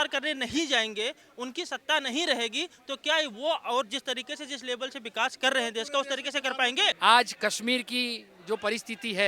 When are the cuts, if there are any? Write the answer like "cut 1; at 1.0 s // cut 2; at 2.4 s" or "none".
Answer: cut 1; at 7.0 s